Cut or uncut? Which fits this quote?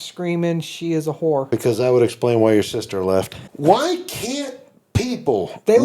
cut